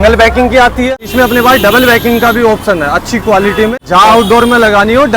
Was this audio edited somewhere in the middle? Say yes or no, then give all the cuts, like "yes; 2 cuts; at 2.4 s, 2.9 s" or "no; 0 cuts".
yes; 2 cuts; at 1.0 s, 3.7 s